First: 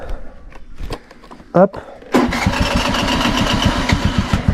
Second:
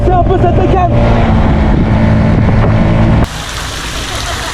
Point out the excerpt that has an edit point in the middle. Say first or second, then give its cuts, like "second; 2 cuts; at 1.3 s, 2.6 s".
second; 1 cut; at 3.2 s